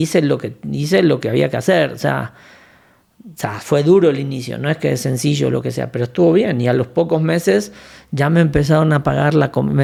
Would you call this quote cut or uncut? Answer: uncut